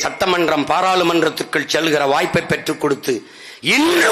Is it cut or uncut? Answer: uncut